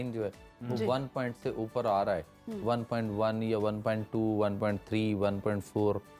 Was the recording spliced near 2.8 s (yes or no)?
no